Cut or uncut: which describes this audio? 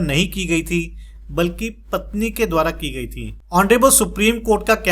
cut